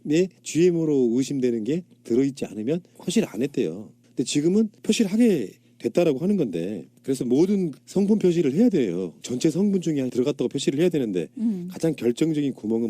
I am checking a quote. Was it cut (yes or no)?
yes